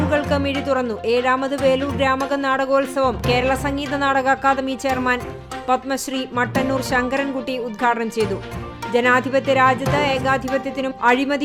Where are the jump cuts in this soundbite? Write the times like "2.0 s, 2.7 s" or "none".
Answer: none